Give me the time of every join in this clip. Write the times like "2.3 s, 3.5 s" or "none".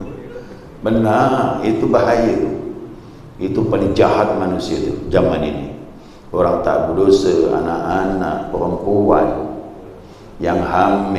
none